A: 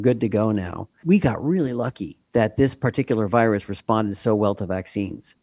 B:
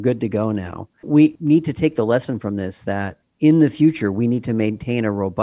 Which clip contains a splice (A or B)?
B